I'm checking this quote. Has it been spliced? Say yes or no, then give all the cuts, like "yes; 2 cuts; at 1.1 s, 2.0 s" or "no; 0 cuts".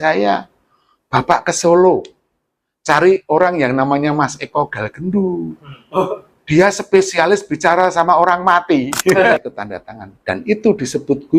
yes; 1 cut; at 9.1 s